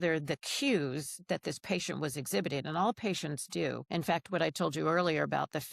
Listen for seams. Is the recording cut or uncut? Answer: cut